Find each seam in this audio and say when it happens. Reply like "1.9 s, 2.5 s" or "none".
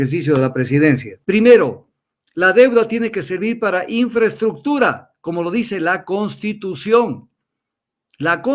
1.1 s